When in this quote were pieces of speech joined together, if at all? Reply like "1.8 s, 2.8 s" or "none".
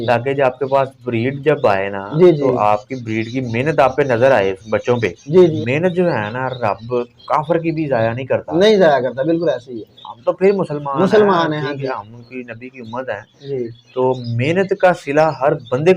5.6 s